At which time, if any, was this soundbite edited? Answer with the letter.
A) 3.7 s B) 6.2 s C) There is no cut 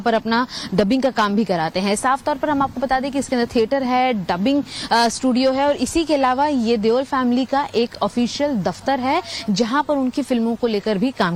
C